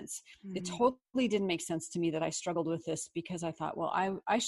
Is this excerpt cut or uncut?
cut